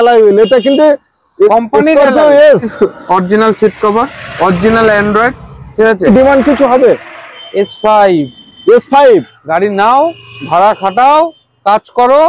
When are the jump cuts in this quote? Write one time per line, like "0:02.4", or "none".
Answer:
0:02.7
0:06.1